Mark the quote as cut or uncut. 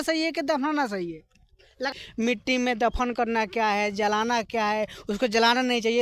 cut